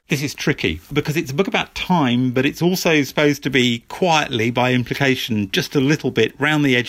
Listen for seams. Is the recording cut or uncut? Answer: cut